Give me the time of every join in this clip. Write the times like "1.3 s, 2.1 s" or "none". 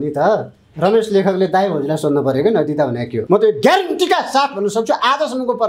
3.2 s